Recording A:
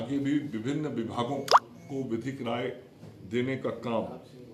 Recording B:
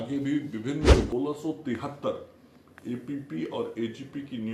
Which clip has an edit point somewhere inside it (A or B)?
B